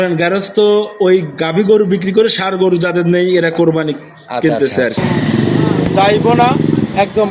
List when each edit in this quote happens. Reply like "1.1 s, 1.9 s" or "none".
5.0 s